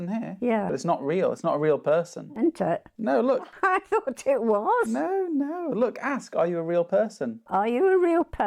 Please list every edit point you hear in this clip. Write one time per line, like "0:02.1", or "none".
none